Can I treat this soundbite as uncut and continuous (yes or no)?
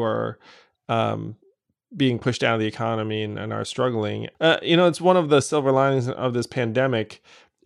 no